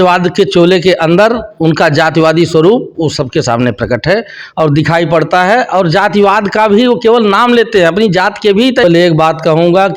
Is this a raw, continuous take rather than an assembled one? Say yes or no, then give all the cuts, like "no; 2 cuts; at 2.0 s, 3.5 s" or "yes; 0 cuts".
no; 1 cut; at 8.8 s